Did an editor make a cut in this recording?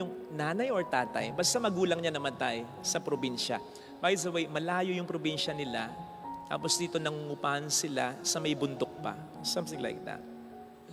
no; 0 cuts

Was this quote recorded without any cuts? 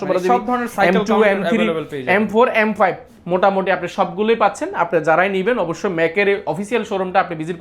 yes; 0 cuts

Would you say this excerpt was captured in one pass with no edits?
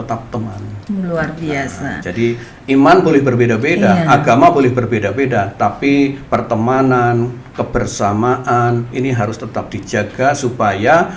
yes; 0 cuts

